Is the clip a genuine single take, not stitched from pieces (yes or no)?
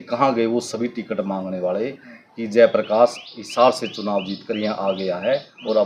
yes